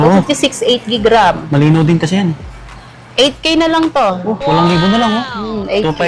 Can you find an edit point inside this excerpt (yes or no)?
no